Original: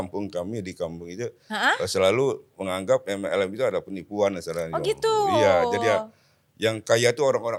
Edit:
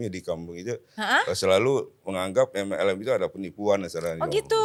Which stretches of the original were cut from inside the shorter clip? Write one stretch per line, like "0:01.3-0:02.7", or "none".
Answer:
none